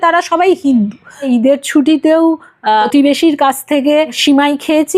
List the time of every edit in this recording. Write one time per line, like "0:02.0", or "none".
0:01.3
0:02.9
0:04.2